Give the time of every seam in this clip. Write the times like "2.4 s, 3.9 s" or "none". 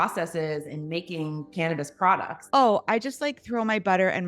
2.3 s